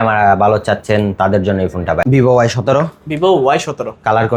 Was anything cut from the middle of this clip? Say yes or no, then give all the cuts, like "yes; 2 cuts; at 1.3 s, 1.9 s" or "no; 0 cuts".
yes; 1 cut; at 2.0 s